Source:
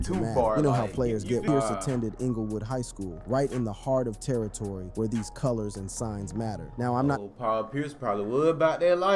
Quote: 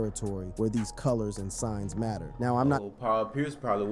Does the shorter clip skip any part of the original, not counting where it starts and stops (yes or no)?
no